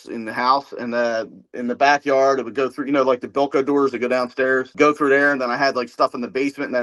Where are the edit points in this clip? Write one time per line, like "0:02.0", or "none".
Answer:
none